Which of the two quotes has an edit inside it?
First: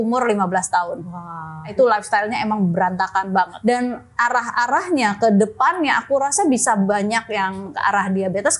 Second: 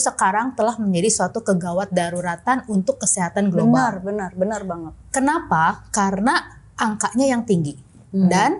first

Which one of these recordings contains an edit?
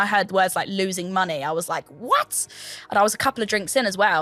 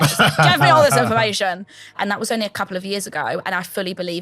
second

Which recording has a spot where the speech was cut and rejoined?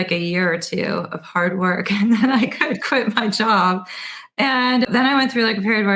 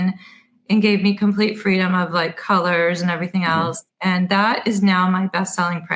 first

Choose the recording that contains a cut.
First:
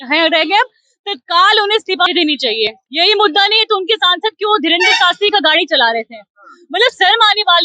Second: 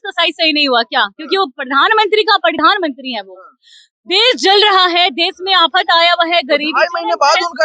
first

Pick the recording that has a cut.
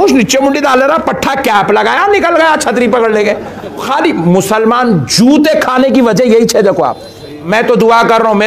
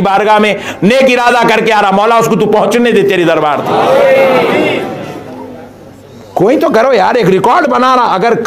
first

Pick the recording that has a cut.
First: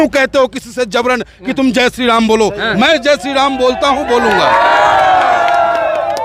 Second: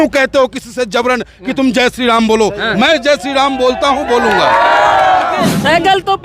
second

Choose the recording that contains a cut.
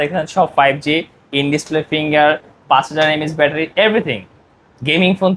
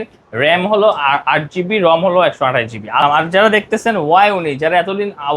second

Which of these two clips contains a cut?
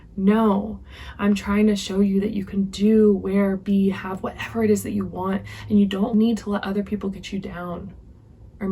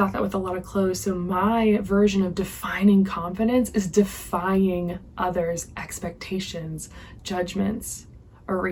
first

